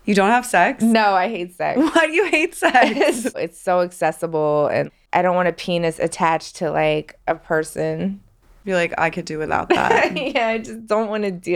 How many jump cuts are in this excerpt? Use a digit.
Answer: 2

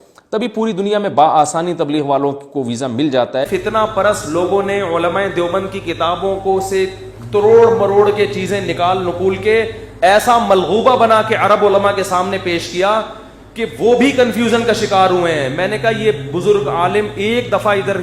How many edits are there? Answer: 1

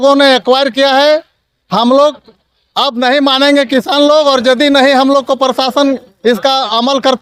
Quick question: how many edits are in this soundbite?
0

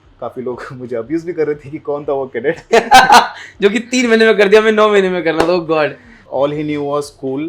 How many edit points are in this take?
1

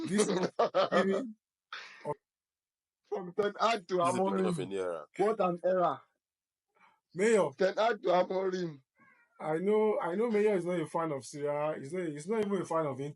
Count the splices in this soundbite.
1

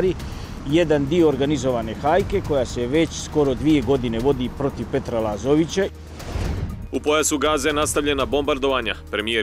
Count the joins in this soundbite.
1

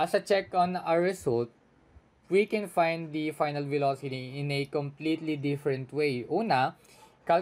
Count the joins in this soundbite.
0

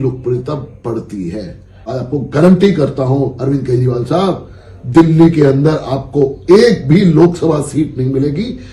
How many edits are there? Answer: 1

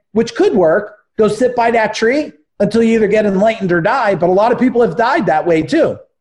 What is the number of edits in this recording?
0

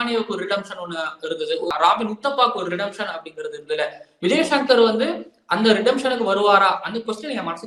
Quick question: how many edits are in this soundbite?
1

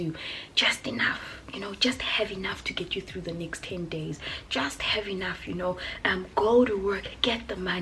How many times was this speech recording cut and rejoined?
0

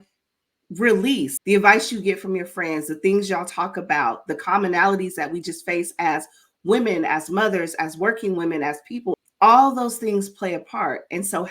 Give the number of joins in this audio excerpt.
2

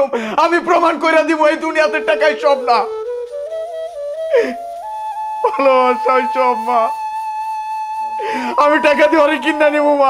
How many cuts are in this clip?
0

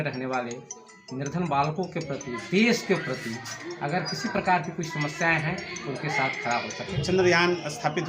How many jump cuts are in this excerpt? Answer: 1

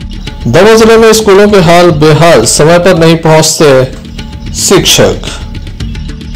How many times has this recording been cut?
0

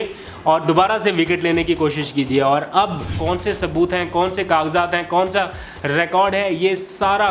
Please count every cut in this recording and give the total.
1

